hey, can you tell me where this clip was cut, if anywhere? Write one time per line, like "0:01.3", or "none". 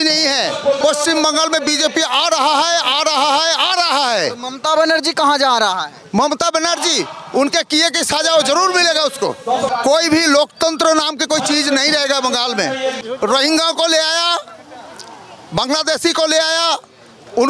0:00.8
0:09.7
0:13.0